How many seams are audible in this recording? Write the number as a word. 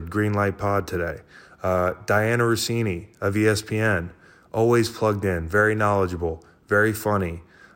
zero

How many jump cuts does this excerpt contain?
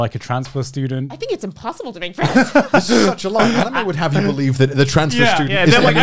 zero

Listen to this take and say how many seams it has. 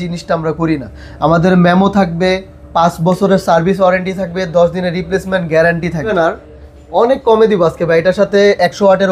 one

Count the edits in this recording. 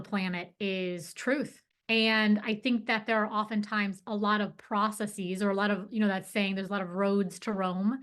one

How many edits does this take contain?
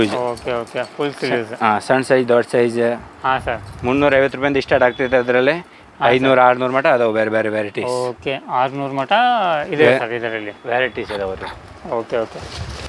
zero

